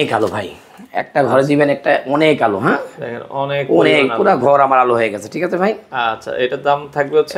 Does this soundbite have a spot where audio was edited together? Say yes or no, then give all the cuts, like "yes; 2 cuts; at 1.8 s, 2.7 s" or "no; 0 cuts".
no; 0 cuts